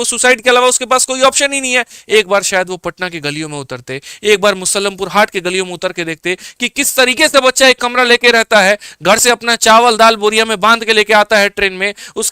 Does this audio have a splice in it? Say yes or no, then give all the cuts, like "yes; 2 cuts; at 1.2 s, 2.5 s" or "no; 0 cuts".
yes; 1 cut; at 2.0 s